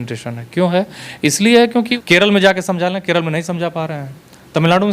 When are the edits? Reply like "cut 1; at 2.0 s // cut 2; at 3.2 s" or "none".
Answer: cut 1; at 1.9 s